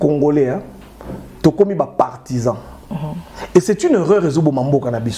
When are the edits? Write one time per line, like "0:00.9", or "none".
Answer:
none

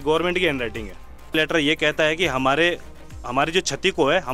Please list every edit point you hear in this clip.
0:01.3

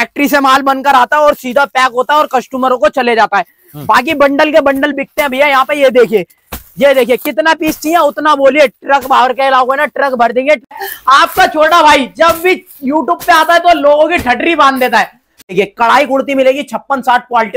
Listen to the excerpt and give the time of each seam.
0:10.7
0:15.5

